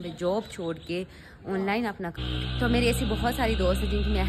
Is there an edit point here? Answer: yes; 1 cut; at 2.2 s

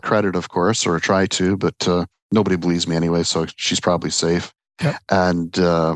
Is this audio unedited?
yes; 0 cuts

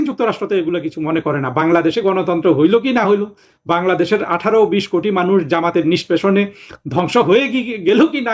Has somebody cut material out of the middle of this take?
no; 0 cuts

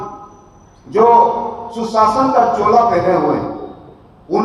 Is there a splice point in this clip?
no; 0 cuts

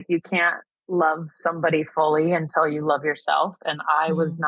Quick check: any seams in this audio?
no; 0 cuts

